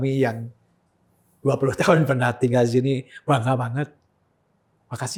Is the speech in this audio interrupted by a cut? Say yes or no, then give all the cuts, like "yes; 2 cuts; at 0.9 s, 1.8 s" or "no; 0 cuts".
no; 0 cuts